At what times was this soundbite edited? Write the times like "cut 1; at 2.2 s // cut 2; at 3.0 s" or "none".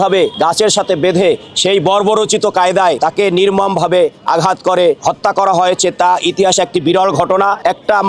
none